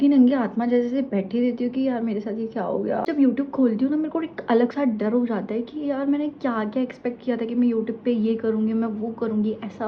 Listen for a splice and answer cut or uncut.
cut